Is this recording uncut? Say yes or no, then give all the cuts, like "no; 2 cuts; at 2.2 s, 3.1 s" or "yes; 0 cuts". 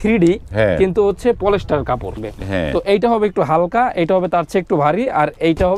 no; 1 cut; at 2.3 s